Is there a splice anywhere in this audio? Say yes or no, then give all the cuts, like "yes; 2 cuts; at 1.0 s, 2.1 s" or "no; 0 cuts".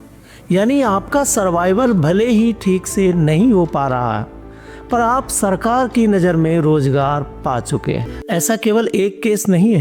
yes; 1 cut; at 8.1 s